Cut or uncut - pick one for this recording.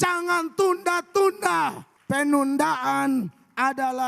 cut